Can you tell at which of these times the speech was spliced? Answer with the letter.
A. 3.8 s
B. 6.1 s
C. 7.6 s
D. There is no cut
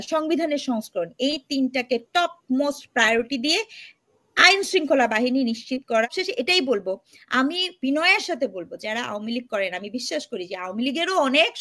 B